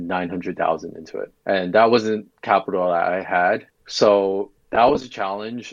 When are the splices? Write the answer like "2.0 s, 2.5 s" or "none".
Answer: 1.3 s, 2.3 s, 3.8 s